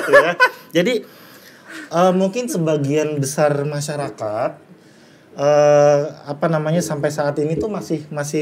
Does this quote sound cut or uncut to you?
uncut